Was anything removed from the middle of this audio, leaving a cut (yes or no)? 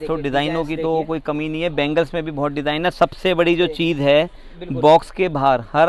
no